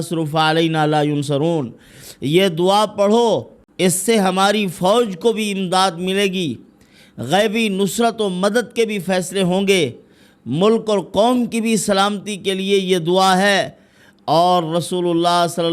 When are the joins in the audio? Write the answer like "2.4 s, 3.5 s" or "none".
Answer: 3.6 s